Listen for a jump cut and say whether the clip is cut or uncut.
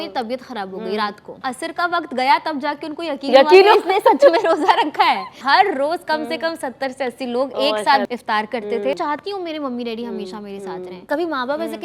cut